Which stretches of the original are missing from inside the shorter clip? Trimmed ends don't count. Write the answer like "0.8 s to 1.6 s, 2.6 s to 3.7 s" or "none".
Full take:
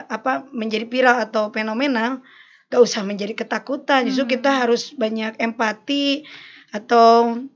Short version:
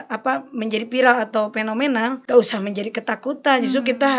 2.2 s to 2.6 s